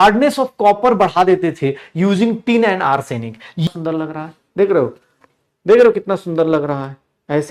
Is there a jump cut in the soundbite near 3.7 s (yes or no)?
yes